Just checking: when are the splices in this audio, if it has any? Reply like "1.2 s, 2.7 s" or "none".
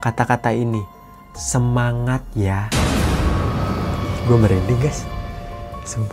none